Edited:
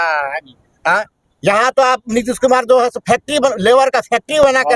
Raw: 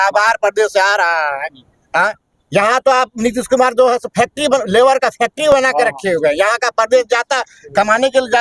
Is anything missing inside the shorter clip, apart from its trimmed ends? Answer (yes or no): no